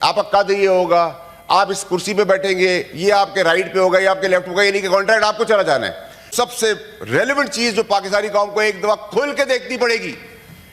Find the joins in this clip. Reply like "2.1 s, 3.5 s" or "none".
6.3 s